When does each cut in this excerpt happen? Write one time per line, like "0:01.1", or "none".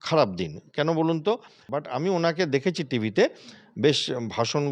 0:01.8